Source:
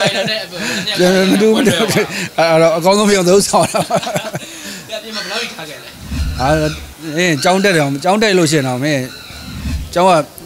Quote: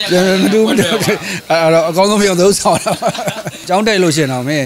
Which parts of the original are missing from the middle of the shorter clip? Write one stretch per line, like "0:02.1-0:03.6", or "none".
0:04.5-0:08.0